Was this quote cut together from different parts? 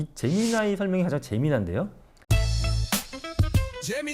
yes; 1 cut; at 2.1 s

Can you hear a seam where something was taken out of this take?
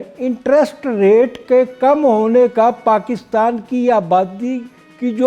no; 0 cuts

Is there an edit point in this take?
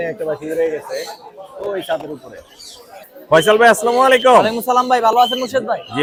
no; 0 cuts

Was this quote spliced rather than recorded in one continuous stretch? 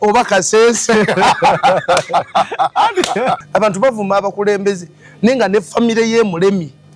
yes; 1 cut; at 3.4 s

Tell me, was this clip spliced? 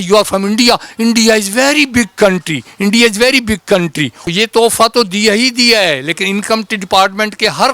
yes; 1 cut; at 4.2 s

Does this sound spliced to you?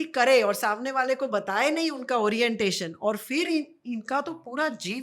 no; 0 cuts

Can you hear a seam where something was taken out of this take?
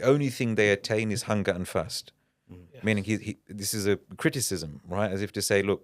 no; 0 cuts

